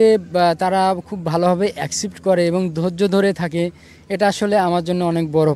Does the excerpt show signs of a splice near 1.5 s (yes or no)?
no